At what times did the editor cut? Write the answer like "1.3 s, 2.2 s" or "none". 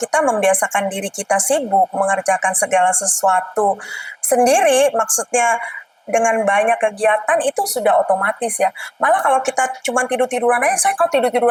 none